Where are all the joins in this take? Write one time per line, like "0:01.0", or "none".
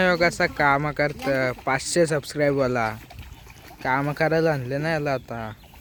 none